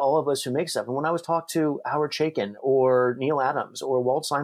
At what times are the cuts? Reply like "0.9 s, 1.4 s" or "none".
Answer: none